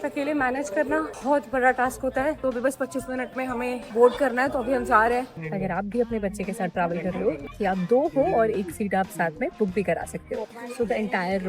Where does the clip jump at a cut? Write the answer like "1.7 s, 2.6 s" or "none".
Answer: 1.1 s, 2.4 s, 3.9 s, 5.4 s, 7.4 s, 10.6 s